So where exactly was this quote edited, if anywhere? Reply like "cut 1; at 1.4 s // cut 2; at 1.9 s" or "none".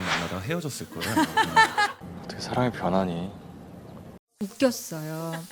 cut 1; at 2.0 s // cut 2; at 4.4 s